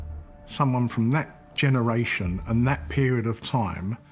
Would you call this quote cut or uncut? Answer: uncut